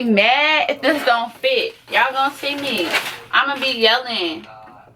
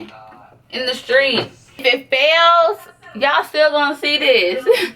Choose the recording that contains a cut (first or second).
second